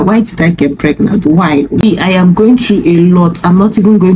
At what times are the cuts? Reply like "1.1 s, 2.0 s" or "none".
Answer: 1.8 s